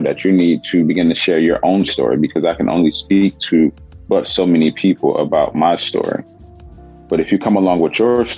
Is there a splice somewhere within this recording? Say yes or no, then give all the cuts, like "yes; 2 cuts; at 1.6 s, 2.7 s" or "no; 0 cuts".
no; 0 cuts